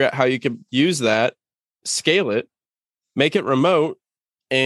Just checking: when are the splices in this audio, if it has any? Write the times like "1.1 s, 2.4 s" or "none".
none